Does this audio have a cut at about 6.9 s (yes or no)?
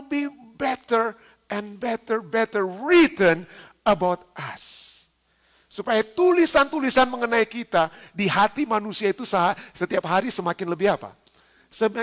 no